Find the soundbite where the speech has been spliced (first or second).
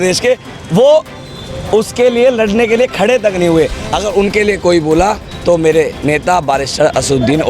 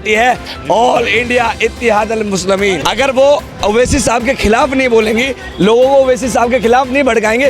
second